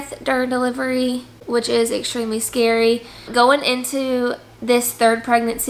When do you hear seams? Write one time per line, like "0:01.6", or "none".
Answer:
none